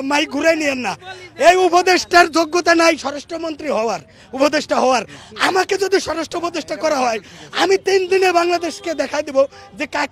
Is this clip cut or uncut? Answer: uncut